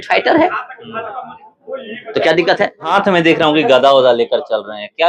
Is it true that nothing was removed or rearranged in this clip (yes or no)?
no